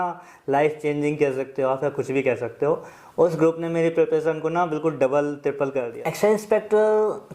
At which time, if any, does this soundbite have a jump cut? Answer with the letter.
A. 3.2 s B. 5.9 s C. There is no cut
B